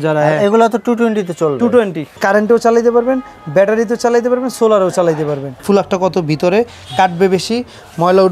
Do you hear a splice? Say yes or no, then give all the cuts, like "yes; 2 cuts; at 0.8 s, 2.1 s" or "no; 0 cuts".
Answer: yes; 2 cuts; at 2.2 s, 5.6 s